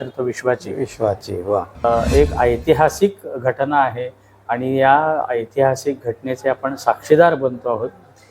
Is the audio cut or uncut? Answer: cut